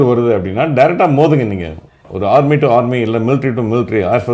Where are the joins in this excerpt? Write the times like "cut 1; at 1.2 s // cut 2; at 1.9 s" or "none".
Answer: none